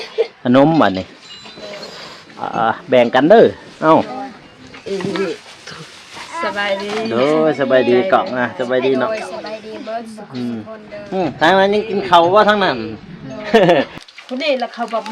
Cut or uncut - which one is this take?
cut